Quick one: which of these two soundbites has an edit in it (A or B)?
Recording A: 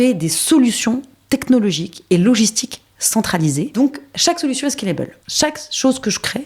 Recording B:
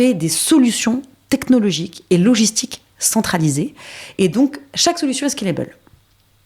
A